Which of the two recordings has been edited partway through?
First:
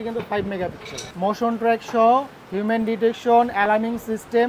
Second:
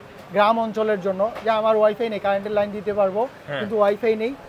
first; 1 cut; at 0.9 s

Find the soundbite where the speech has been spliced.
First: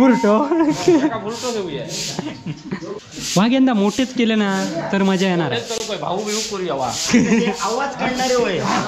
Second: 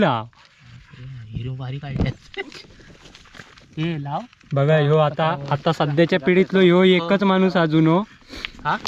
first; 1 cut; at 3.0 s

